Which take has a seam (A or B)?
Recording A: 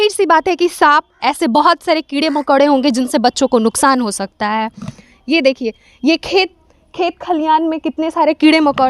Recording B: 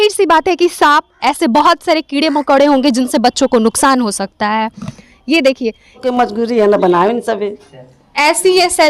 B